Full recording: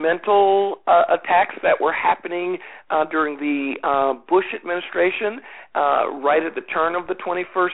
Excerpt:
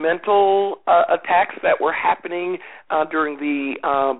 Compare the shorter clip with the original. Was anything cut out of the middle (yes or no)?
no